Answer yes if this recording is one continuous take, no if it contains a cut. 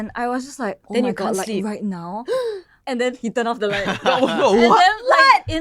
yes